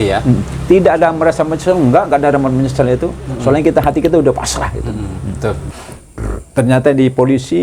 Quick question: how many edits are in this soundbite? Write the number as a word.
one